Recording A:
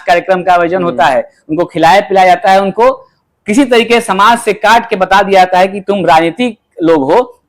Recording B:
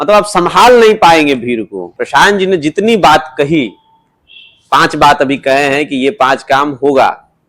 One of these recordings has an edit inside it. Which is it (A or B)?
B